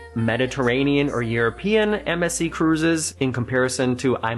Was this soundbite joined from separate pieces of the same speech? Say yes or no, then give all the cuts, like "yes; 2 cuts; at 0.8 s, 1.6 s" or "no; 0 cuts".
yes; 1 cut; at 3.1 s